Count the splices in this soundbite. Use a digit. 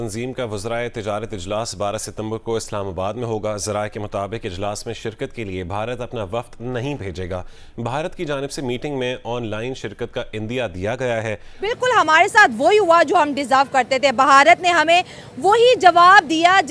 1